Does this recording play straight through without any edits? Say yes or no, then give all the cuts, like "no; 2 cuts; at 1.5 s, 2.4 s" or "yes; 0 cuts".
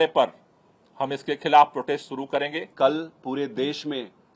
yes; 0 cuts